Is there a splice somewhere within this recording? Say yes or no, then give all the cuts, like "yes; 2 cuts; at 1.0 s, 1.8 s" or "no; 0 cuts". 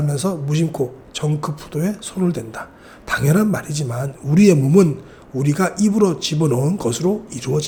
no; 0 cuts